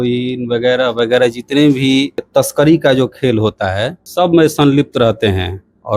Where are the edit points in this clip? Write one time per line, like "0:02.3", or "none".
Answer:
0:02.2
0:04.0